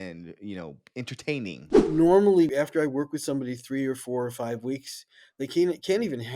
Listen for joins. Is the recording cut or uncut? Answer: cut